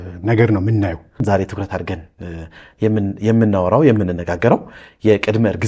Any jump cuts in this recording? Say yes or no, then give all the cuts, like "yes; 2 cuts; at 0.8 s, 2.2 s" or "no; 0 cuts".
yes; 1 cut; at 1.2 s